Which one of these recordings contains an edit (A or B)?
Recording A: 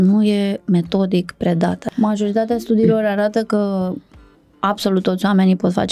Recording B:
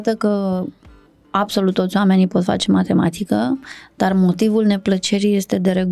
A